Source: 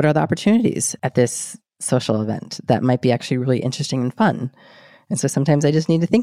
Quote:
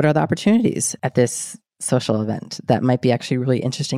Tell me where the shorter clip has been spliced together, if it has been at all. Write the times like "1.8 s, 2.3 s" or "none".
none